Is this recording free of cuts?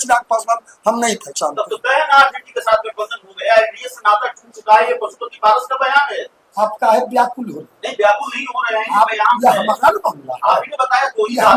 yes; 0 cuts

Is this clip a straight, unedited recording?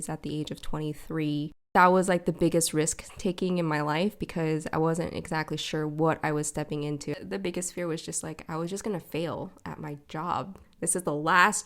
no; 3 cuts; at 1.7 s, 7.1 s, 10.6 s

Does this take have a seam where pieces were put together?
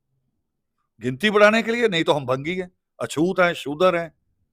no; 0 cuts

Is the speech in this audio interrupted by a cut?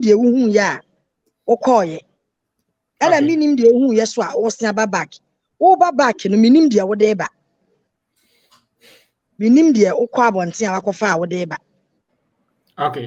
no; 0 cuts

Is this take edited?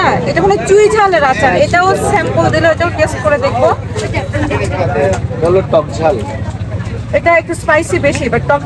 no; 0 cuts

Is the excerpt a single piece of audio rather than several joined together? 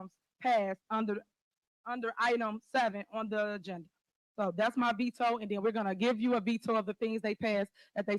yes; 0 cuts

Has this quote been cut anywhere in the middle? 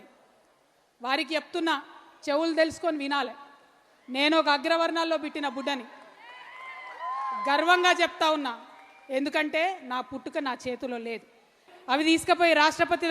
yes; 1 cut; at 11.7 s

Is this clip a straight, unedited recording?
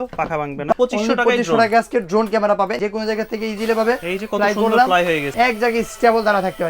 no; 3 cuts; at 0.7 s, 2.7 s, 5.3 s

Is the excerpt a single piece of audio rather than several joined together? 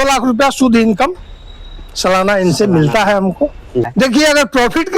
no; 1 cut; at 4.0 s

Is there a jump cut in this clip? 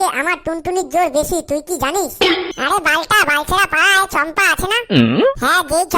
yes; 1 cut; at 2.5 s

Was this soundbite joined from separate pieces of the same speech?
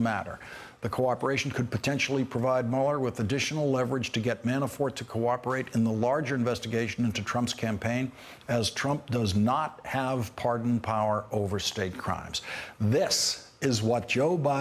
no; 0 cuts

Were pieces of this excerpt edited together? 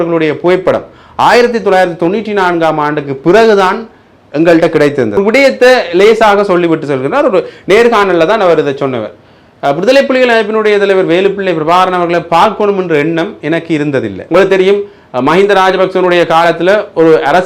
yes; 2 cuts; at 5.2 s, 14.2 s

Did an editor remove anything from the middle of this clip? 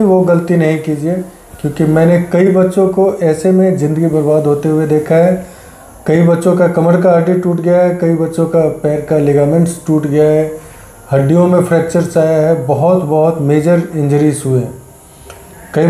no; 0 cuts

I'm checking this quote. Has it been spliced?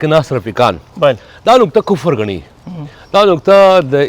no; 0 cuts

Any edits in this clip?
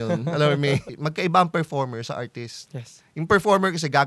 yes; 1 cut; at 1.0 s

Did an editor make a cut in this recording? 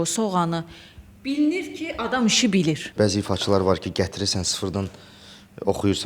yes; 1 cut; at 2.9 s

